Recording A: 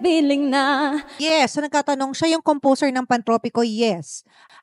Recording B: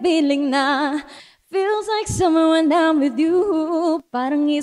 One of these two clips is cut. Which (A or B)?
A